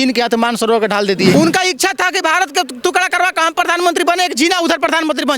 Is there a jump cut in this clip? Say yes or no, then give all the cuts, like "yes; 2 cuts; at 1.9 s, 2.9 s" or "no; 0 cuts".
yes; 1 cut; at 1.3 s